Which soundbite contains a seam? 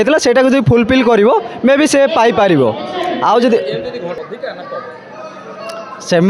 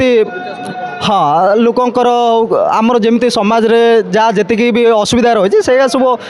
first; 1 cut; at 4.2 s

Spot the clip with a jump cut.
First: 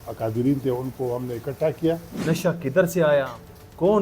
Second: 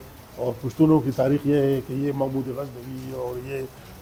first; 1 cut; at 2.1 s

